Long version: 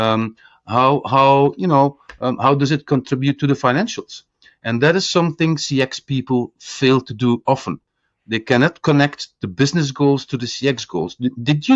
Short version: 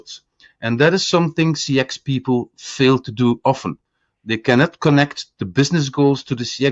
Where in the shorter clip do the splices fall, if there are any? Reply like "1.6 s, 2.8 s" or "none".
none